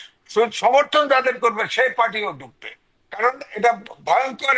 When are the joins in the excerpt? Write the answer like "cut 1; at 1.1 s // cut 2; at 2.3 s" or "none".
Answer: none